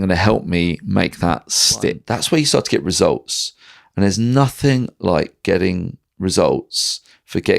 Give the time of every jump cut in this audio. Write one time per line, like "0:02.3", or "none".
0:02.0